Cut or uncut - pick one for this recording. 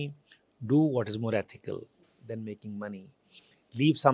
uncut